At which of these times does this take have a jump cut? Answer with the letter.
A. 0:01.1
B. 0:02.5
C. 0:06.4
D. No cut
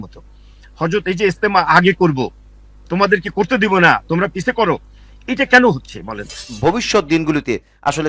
C